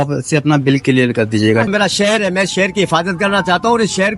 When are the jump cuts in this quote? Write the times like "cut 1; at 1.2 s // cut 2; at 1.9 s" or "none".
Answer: cut 1; at 1.7 s